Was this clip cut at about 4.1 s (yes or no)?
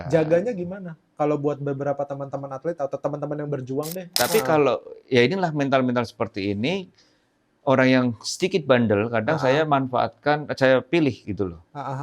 yes